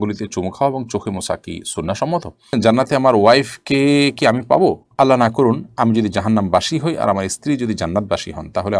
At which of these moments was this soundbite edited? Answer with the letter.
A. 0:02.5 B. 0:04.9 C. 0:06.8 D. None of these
A